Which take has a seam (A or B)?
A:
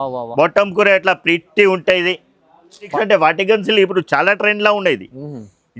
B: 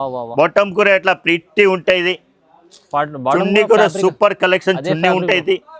A